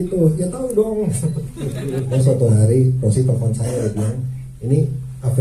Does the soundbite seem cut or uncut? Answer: cut